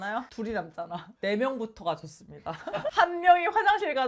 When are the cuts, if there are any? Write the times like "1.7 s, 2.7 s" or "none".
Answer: 2.9 s